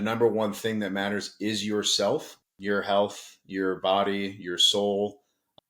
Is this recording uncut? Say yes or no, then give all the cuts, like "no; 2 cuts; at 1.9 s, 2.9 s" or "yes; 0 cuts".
yes; 0 cuts